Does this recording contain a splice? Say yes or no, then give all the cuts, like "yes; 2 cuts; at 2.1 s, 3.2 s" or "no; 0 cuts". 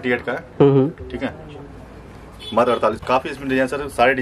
yes; 1 cut; at 3.0 s